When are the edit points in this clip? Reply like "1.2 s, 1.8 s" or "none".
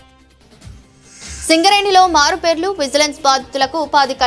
1.1 s